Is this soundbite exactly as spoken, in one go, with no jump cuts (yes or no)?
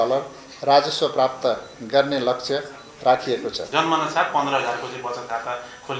no